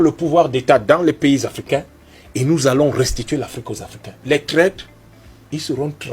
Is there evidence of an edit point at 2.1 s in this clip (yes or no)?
no